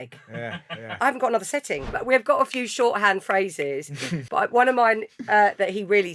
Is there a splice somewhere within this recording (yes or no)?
yes